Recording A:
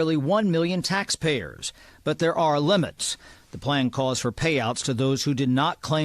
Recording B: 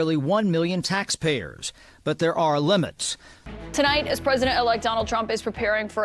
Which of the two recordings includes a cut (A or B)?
B